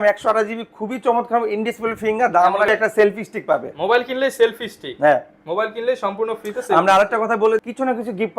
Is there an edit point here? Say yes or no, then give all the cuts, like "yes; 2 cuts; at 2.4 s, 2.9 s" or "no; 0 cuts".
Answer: yes; 2 cuts; at 2.7 s, 7.6 s